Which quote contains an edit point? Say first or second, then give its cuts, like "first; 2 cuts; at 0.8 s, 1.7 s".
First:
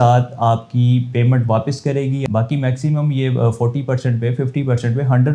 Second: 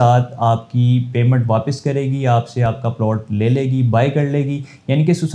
first; 1 cut; at 2.2 s